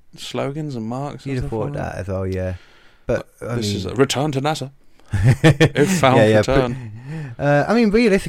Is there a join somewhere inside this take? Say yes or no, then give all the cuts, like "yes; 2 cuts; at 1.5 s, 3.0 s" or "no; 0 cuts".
no; 0 cuts